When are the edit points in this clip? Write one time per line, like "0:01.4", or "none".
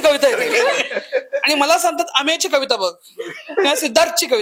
none